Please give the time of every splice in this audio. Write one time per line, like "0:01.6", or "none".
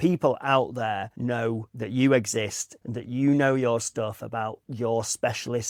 none